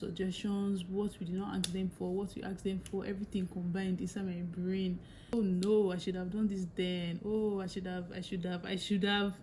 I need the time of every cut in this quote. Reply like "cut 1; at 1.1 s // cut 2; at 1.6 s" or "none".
cut 1; at 5.3 s